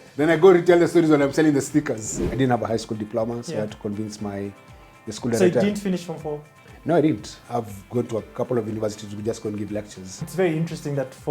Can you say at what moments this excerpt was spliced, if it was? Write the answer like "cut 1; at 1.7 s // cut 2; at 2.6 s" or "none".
cut 1; at 2.1 s // cut 2; at 7.3 s // cut 3; at 10.2 s